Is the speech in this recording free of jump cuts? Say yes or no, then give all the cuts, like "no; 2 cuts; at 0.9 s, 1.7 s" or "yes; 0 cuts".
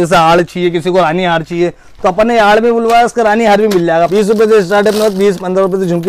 no; 1 cut; at 4.1 s